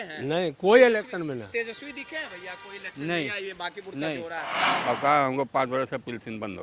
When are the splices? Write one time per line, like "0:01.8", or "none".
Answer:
0:04.7